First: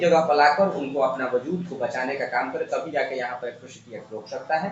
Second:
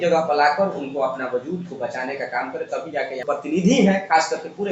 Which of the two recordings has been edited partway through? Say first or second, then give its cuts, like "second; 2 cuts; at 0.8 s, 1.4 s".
second; 1 cut; at 3.2 s